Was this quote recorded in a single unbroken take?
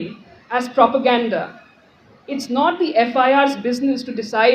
yes; 0 cuts

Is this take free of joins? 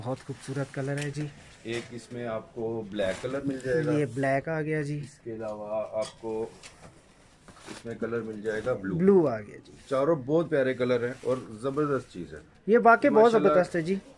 yes; 0 cuts

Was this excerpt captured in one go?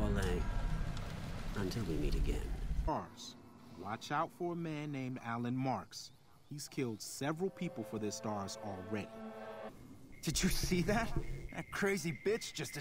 no; 2 cuts; at 2.9 s, 9.7 s

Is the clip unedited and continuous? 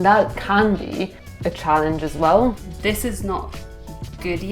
no; 2 cuts; at 1.2 s, 2.7 s

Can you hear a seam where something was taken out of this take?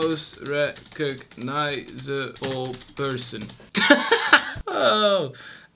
yes; 1 cut; at 4.6 s

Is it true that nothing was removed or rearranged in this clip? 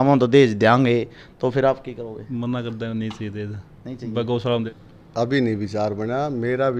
no; 1 cut; at 4.7 s

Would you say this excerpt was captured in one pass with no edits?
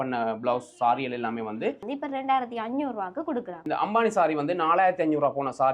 no; 2 cuts; at 1.8 s, 3.6 s

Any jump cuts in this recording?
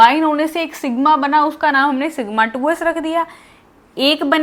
no; 0 cuts

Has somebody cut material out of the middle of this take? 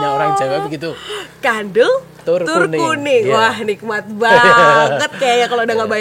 no; 0 cuts

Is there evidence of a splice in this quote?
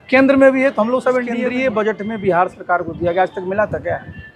yes; 1 cut; at 1.4 s

